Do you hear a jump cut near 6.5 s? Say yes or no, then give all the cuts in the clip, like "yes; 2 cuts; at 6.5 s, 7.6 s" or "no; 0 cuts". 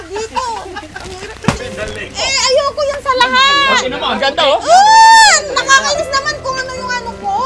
no; 1 cut; at 2.2 s